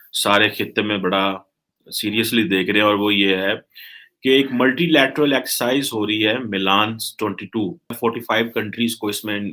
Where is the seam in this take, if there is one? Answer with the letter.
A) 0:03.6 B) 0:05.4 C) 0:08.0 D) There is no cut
C